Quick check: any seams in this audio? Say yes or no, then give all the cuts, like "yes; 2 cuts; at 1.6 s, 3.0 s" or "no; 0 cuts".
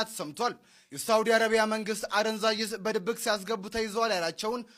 no; 0 cuts